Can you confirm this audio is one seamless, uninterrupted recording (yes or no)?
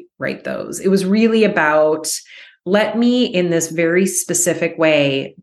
yes